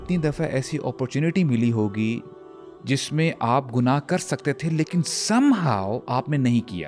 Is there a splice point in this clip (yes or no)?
no